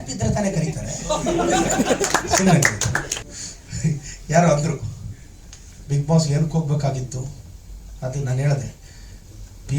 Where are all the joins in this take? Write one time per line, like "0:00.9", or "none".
0:03.3